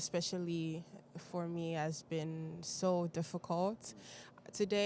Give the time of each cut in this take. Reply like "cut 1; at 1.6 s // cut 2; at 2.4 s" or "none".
none